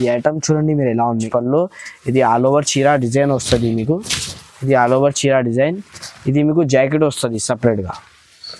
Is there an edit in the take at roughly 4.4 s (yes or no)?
no